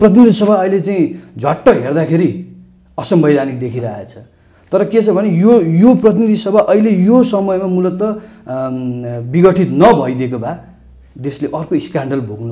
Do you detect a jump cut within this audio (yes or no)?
no